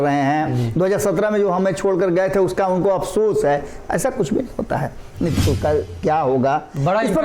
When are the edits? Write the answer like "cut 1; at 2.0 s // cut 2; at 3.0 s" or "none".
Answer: cut 1; at 5.4 s